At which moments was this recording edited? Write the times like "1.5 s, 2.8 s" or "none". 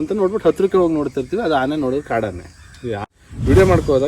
3.0 s